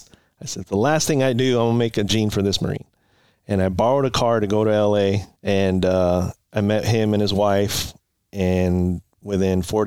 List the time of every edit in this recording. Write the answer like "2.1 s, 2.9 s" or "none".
5.3 s